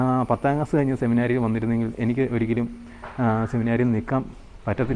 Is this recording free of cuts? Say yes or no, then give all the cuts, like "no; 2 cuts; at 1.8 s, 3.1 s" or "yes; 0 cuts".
yes; 0 cuts